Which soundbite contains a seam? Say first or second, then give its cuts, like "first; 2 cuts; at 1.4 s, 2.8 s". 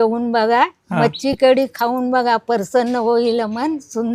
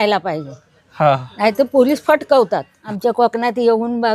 second; 1 cut; at 2.8 s